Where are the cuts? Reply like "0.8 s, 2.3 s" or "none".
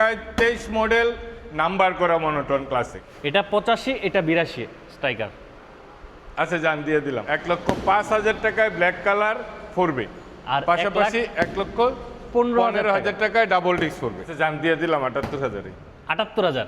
3.0 s, 7.2 s, 14.3 s